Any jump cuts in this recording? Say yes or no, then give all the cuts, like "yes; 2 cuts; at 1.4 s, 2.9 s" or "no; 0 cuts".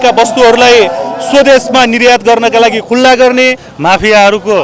yes; 1 cut; at 3.7 s